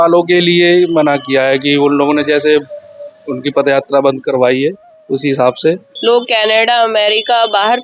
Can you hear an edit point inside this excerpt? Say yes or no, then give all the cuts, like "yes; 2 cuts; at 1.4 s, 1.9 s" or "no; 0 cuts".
yes; 1 cut; at 5.9 s